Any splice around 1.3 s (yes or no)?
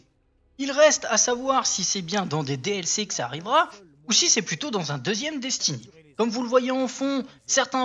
no